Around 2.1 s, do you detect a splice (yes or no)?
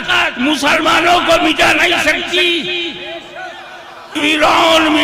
no